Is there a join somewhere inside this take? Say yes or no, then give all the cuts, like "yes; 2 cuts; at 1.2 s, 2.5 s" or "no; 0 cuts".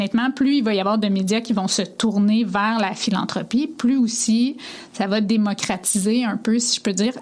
no; 0 cuts